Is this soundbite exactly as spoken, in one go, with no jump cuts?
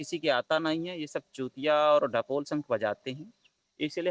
yes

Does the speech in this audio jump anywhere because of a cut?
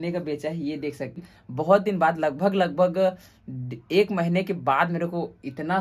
yes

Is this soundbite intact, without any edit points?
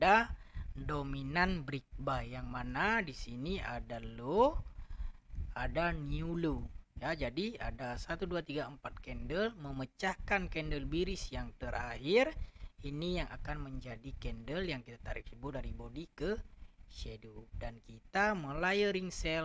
yes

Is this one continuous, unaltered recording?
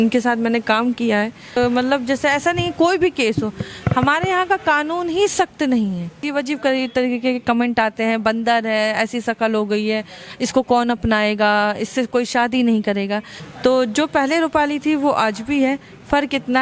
no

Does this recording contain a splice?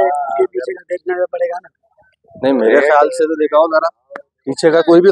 no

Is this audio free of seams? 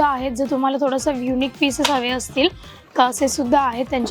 yes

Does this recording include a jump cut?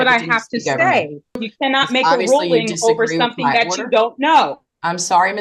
yes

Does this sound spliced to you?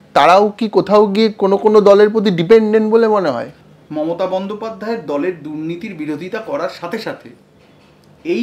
yes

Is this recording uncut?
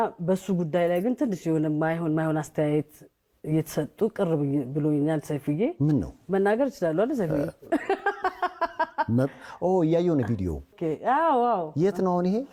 yes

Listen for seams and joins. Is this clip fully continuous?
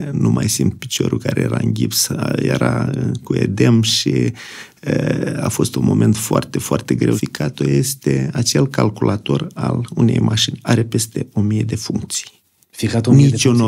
no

